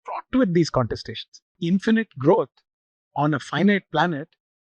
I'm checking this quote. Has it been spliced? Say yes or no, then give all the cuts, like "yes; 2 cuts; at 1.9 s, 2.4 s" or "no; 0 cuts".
yes; 1 cut; at 1.6 s